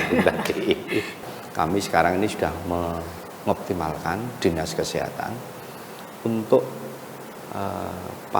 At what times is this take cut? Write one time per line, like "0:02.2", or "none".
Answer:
0:01.1